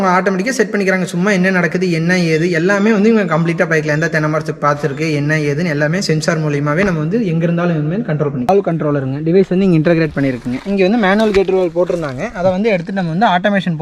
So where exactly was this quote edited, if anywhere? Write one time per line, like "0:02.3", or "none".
0:08.5